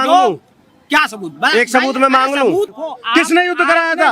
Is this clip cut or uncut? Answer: cut